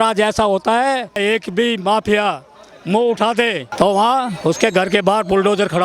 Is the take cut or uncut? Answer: cut